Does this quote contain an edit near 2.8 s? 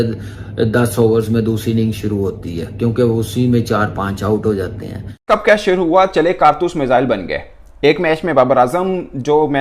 yes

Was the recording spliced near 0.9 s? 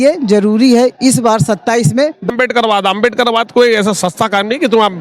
no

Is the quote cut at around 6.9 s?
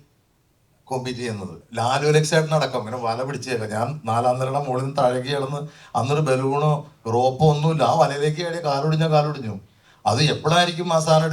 no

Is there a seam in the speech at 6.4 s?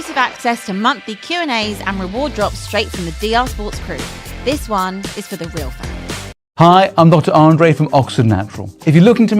yes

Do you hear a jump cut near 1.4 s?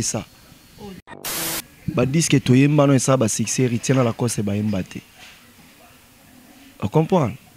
yes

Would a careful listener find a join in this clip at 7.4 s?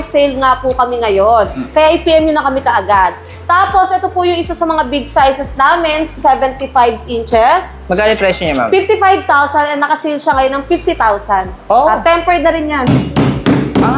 no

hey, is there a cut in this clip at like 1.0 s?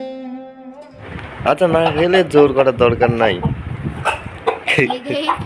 yes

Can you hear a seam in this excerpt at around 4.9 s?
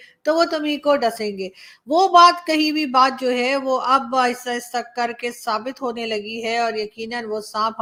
no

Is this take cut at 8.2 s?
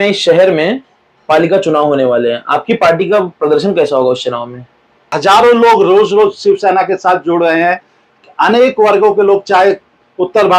no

